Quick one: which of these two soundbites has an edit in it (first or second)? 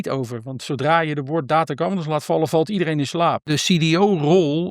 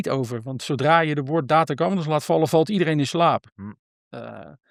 first